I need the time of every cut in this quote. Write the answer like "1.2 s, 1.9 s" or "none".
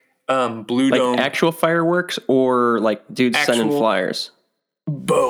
none